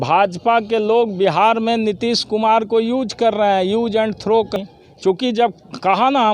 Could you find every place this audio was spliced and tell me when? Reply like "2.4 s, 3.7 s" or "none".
4.5 s